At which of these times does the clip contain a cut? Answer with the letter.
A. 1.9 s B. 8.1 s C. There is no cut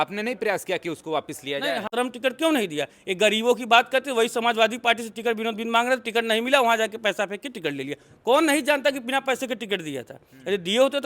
A